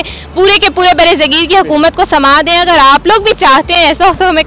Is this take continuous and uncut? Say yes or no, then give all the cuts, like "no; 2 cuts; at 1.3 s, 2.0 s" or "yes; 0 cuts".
yes; 0 cuts